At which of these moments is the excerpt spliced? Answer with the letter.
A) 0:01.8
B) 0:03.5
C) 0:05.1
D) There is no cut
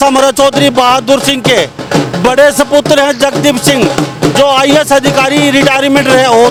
D